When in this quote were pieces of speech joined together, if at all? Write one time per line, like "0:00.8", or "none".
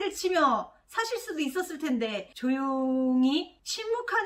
none